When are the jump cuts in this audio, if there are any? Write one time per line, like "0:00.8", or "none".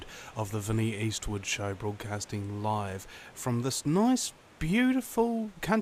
none

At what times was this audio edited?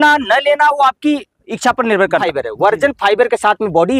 0:02.2

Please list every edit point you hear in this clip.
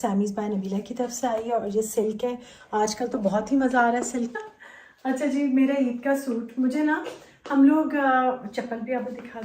0:04.4

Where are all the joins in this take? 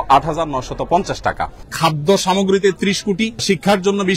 0:01.6
0:03.4

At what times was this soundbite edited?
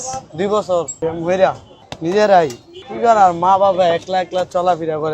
0:00.9
0:01.7

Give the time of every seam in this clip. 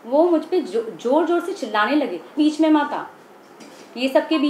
0:02.4

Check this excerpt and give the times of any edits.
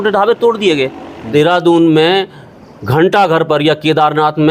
0:01.3

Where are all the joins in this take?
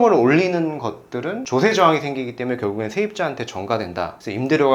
0:01.4

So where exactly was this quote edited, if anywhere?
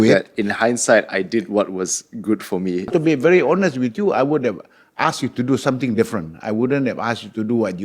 0:02.9

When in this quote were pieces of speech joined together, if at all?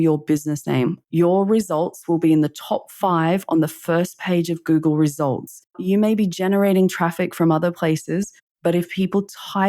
0:01.0
0:05.7

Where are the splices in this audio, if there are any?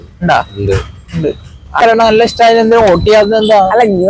0:01.8

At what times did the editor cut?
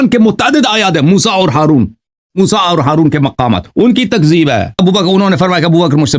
0:04.7

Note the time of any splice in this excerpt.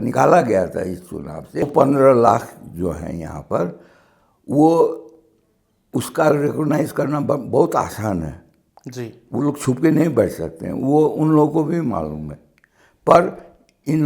0:01.4

